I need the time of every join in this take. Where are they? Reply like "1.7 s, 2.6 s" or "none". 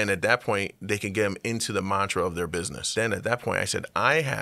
2.9 s

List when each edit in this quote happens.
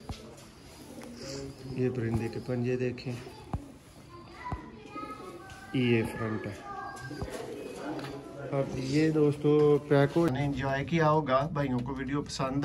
10.3 s

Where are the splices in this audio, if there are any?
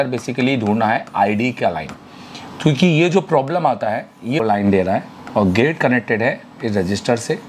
4.4 s

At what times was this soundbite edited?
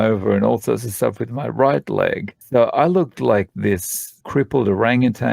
2.3 s, 4.2 s

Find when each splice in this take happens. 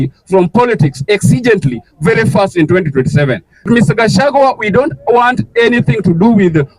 3.7 s

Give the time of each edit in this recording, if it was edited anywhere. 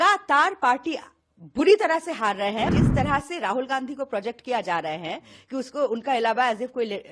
2.7 s

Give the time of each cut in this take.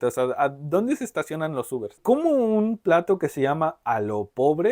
2.0 s

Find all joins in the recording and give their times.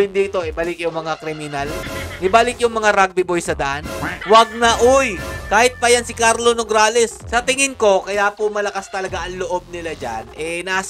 1.9 s, 4.1 s, 7.2 s

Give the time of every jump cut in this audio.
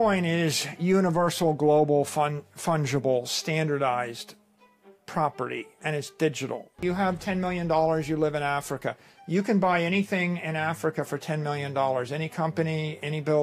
6.7 s

